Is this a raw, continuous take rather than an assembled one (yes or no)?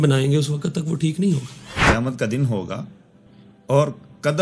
no